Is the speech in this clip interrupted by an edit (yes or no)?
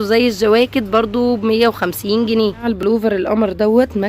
yes